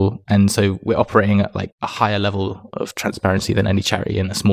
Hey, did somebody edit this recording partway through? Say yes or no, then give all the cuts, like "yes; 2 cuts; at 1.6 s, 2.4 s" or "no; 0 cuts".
yes; 1 cut; at 1.7 s